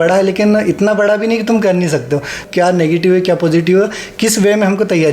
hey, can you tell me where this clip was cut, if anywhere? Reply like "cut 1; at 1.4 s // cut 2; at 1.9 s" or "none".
cut 1; at 2.4 s